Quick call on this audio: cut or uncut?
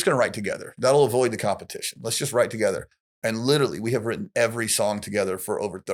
uncut